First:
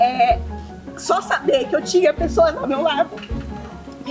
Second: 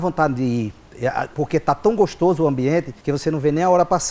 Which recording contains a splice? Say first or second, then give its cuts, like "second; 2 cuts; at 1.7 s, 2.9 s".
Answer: second; 2 cuts; at 1.3 s, 3.0 s